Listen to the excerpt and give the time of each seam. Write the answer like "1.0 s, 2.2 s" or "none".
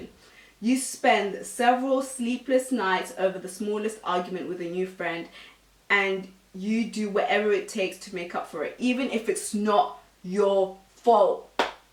none

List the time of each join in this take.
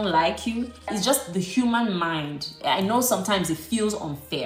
none

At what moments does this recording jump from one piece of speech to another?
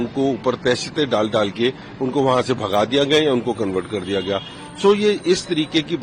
none

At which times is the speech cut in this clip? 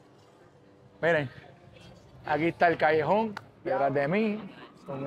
3.5 s

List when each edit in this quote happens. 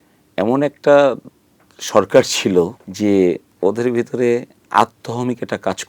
2.8 s, 3.5 s

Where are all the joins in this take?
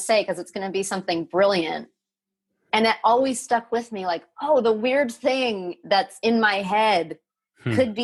none

